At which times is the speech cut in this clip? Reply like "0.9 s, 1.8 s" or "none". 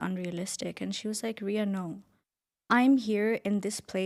none